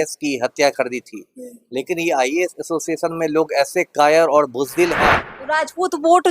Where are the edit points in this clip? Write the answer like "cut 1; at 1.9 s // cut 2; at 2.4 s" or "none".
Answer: cut 1; at 5.3 s